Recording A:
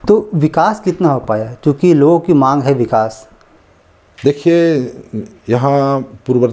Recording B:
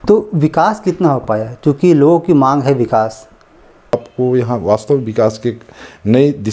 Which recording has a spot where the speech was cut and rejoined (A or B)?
B